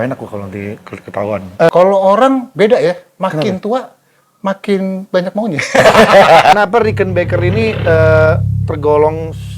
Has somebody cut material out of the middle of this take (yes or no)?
yes